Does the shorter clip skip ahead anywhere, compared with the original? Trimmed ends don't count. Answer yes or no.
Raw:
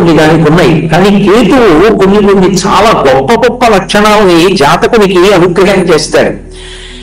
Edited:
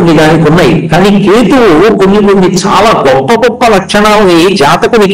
no